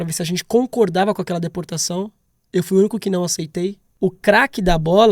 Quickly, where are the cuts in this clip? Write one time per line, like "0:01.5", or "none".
0:03.8